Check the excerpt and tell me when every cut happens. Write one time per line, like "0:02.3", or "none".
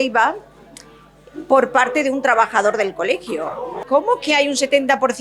0:03.8